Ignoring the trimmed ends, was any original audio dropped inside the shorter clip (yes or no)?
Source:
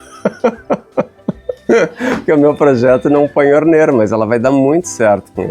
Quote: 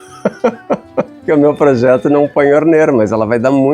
yes